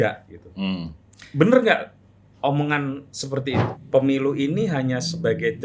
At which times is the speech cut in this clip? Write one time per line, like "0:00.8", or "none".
0:03.7